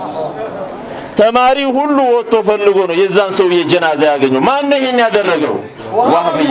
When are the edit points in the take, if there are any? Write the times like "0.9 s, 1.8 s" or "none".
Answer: none